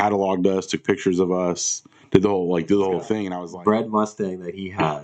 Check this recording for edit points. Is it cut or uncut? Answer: cut